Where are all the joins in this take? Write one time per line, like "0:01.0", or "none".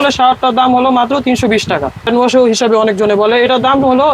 0:02.1